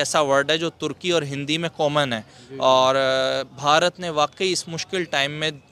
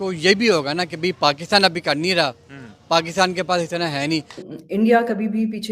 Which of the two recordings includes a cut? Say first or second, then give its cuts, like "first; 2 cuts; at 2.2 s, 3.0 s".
second; 1 cut; at 4.4 s